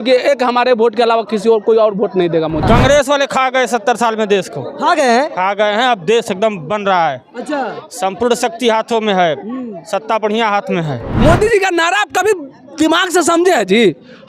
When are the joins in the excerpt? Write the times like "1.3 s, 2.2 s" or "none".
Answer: 2.6 s, 11.0 s